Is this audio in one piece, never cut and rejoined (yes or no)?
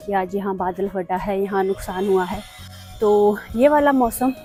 yes